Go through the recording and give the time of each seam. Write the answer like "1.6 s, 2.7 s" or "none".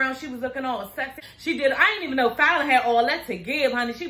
1.2 s